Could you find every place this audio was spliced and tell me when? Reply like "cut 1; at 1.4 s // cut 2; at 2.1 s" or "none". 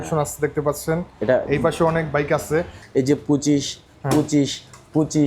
cut 1; at 2.8 s